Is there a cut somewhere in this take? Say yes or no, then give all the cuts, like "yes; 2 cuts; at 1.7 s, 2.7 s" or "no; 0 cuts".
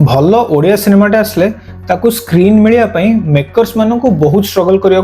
no; 0 cuts